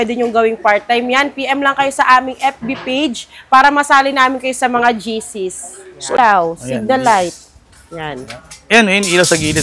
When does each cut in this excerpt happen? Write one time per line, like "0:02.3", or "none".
0:06.1